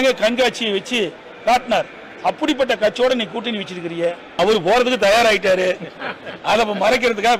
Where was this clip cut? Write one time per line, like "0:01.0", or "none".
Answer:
0:04.4